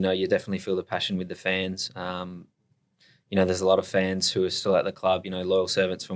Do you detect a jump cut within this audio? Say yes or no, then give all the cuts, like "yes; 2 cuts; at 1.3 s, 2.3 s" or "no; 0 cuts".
no; 0 cuts